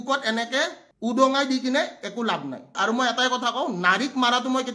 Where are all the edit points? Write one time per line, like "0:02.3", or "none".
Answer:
0:02.7